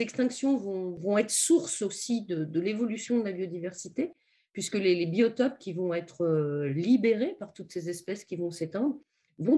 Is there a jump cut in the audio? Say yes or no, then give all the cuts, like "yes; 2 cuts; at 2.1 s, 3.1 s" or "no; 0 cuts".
yes; 1 cut; at 0.9 s